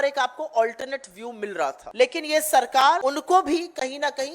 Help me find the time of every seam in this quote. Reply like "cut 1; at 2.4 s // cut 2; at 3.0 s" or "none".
cut 1; at 1.8 s // cut 2; at 3.0 s